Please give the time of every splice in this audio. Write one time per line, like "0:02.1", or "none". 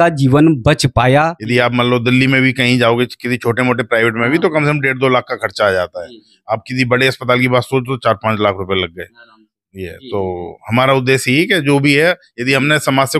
0:01.2